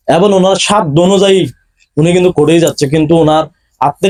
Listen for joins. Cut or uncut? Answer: uncut